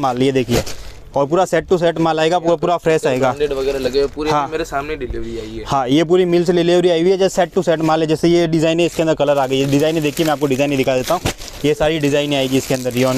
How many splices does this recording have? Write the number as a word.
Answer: zero